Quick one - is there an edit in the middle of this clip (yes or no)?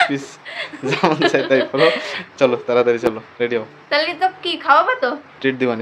no